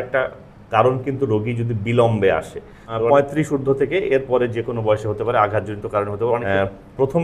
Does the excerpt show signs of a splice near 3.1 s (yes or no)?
yes